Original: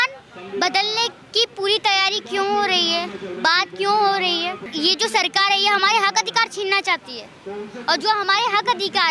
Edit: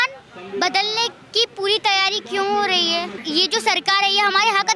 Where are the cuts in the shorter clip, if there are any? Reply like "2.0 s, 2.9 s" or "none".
3.2 s